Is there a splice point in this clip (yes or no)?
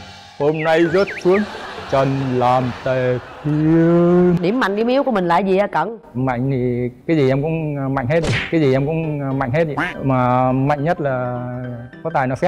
yes